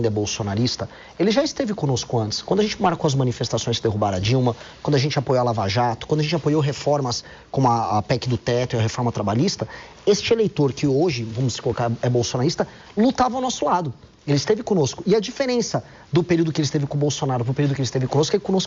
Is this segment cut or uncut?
uncut